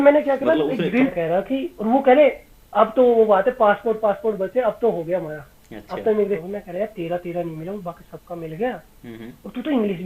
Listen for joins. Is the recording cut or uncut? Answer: cut